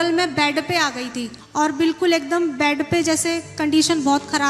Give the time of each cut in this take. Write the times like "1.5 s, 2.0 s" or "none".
none